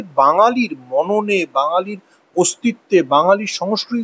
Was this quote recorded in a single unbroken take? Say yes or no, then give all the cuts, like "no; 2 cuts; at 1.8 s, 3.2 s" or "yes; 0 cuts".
yes; 0 cuts